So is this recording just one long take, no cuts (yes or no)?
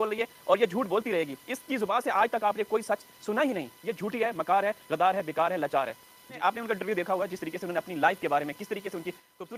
yes